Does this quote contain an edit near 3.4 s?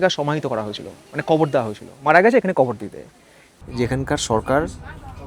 yes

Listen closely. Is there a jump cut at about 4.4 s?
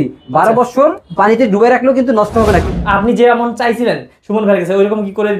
no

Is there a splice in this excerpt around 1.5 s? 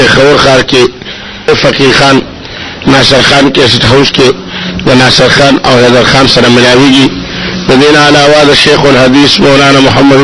yes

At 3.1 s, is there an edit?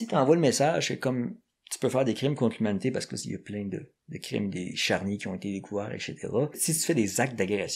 no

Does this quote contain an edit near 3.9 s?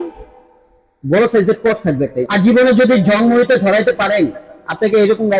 no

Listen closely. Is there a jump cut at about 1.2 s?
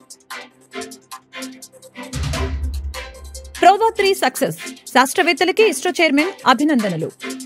yes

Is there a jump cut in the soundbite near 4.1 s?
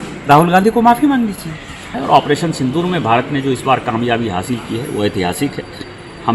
no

